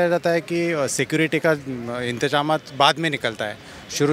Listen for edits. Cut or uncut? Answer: uncut